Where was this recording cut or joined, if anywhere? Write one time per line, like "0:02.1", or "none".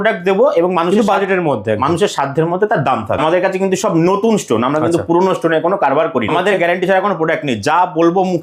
0:03.2
0:06.3

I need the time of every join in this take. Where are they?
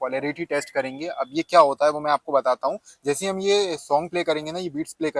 none

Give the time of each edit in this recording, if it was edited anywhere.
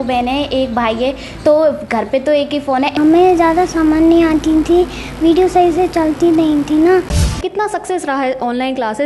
0:02.9
0:07.3

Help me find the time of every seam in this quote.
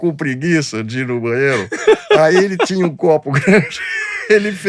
none

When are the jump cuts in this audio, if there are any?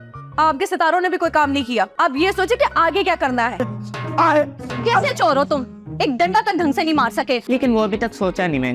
0:03.6
0:07.4

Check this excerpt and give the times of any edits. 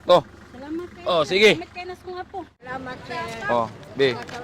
0:02.7

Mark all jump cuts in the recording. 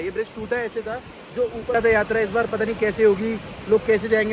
0:01.7

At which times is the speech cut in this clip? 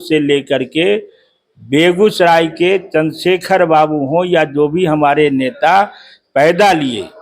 none

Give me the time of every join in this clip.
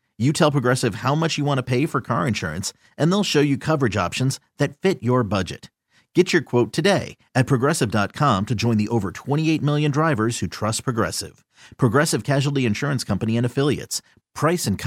none

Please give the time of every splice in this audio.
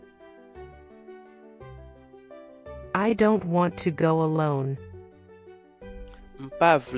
0:01.4

